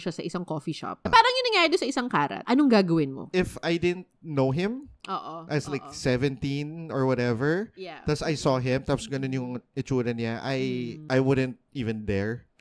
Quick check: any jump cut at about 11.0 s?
yes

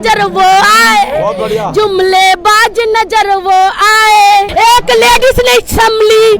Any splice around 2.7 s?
no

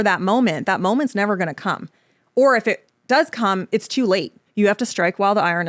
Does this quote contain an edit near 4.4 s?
yes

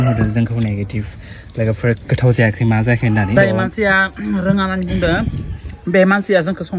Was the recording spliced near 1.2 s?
no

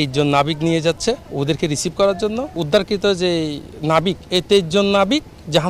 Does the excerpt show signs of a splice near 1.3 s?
yes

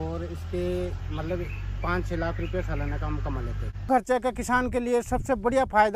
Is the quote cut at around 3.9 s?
yes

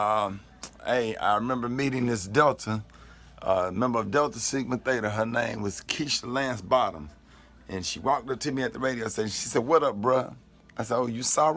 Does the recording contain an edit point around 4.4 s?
no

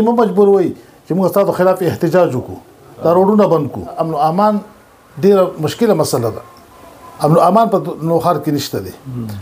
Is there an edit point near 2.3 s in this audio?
no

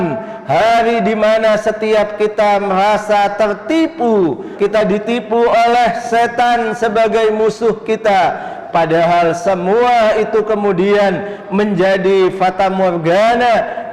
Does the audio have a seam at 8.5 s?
yes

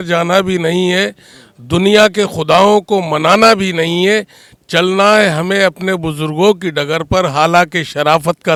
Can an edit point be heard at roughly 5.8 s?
no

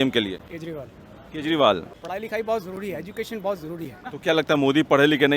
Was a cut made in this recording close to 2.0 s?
yes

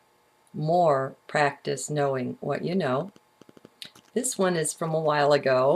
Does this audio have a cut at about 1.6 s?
no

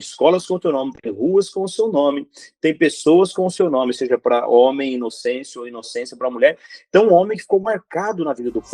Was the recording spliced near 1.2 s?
no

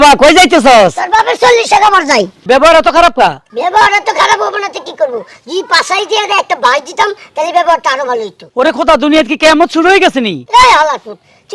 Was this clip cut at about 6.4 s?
no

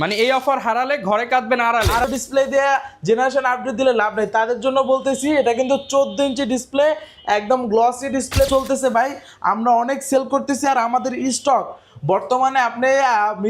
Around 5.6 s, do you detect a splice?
no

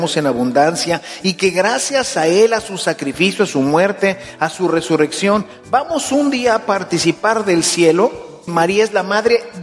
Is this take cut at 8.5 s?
yes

